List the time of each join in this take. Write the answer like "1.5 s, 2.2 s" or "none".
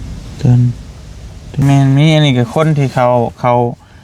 1.6 s